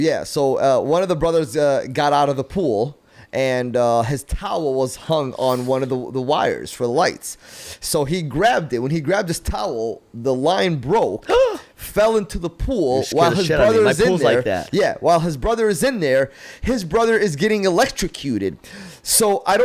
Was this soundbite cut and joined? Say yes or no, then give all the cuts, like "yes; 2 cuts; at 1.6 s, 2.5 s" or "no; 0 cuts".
no; 0 cuts